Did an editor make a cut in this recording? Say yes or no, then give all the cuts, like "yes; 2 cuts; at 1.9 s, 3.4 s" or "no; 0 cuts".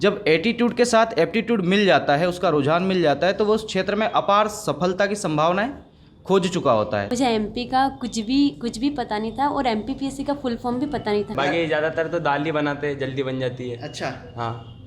yes; 2 cuts; at 7.1 s, 11.3 s